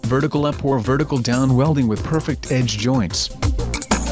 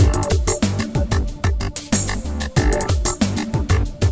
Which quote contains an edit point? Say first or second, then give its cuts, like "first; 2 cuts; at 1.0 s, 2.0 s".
first; 2 cuts; at 1.7 s, 3.2 s